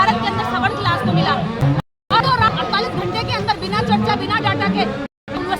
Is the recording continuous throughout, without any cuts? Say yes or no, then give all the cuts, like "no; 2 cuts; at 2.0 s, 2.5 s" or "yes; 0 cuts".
no; 1 cut; at 2.0 s